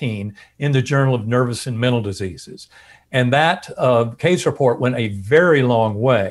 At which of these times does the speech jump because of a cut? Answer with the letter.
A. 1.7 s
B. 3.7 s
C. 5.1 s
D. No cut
D